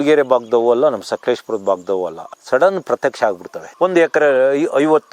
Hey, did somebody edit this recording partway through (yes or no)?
yes